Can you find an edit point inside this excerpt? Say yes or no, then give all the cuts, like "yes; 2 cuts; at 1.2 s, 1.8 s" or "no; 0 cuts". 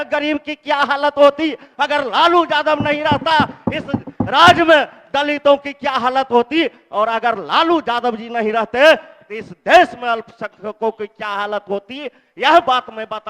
no; 0 cuts